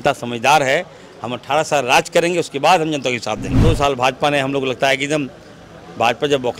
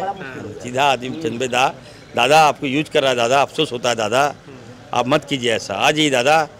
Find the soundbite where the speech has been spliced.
first; 1 cut; at 3.5 s

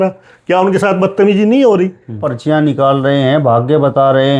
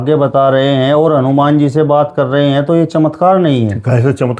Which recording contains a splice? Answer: first; 1 cut; at 2.2 s

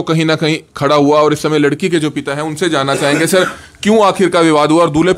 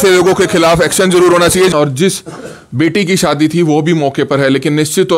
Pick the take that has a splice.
second; 1 cut; at 1.7 s

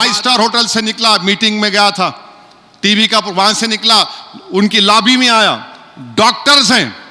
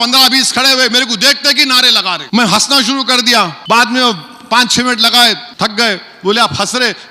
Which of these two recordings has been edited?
second; 3 cuts; at 2.2 s, 3.6 s, 5.5 s

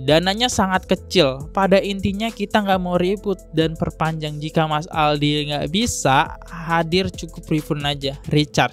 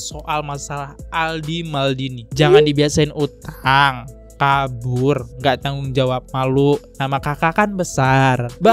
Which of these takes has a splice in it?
second; 1 cut; at 2.2 s

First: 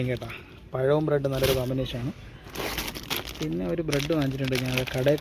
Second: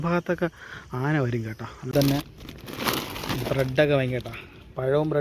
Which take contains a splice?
second; 1 cut; at 1.9 s

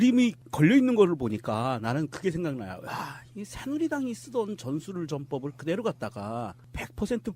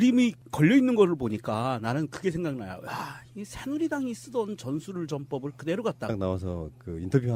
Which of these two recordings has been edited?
first; 1 cut; at 6.1 s

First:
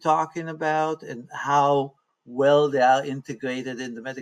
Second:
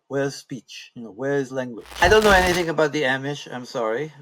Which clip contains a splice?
second; 1 cut; at 2.0 s

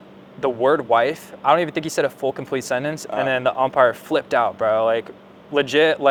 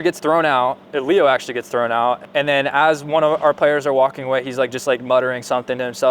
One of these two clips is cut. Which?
second; 2 cuts; at 0.8 s, 2.2 s

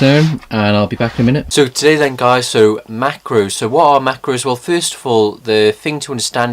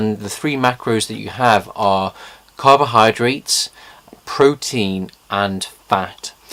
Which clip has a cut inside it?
first; 1 cut; at 3.5 s

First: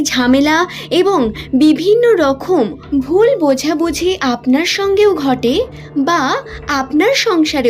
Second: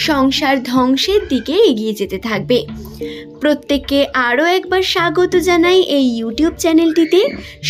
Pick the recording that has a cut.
first; 1 cut; at 2.8 s

